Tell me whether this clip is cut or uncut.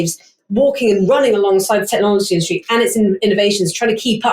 uncut